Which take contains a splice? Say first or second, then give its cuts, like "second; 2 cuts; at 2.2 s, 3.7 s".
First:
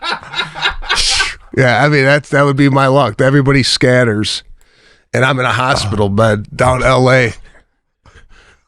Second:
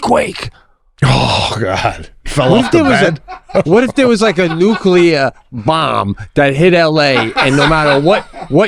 first; 1 cut; at 1.4 s